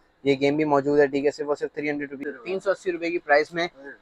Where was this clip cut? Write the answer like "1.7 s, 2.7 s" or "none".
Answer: 2.3 s